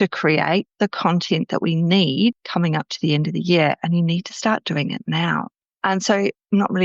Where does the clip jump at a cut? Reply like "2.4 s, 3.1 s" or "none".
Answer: 5.5 s